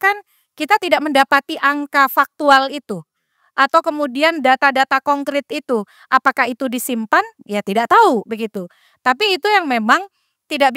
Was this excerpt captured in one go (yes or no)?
yes